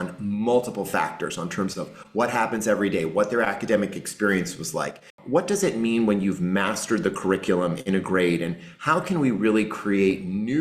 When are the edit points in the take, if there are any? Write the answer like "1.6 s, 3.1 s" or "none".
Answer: 5.1 s

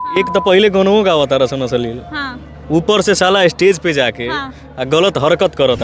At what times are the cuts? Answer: none

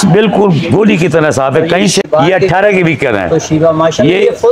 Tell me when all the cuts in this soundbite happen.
2.1 s

